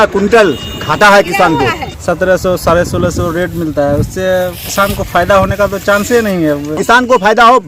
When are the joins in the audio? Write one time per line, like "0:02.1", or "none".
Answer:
0:01.9
0:06.8